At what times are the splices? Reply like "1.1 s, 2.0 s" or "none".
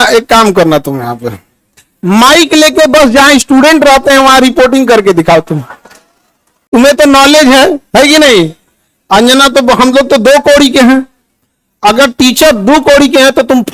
none